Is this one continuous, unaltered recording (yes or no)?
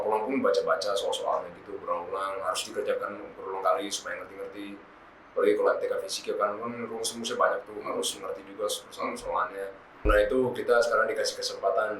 no